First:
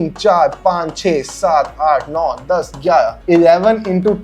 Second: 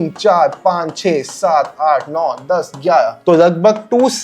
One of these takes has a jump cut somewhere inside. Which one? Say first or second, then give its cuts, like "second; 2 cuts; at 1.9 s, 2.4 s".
second; 1 cut; at 3.2 s